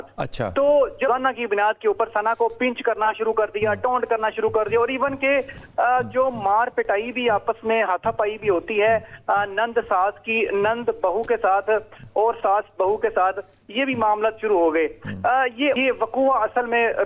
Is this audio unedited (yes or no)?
no